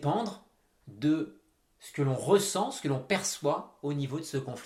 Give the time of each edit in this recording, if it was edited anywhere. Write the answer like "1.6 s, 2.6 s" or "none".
none